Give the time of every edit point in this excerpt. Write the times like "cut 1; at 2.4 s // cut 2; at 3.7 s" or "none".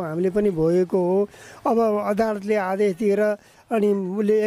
none